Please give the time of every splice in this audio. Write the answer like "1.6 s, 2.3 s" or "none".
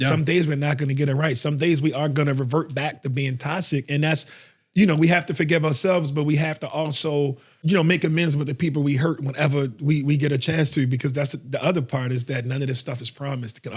7.5 s